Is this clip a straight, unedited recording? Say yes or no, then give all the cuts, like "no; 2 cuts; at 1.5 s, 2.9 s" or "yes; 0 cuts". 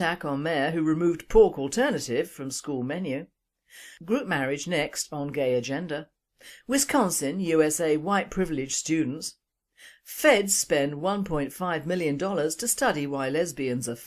yes; 0 cuts